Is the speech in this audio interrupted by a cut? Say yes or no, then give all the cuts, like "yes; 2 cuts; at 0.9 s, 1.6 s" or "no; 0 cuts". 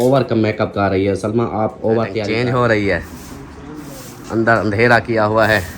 yes; 1 cut; at 2.3 s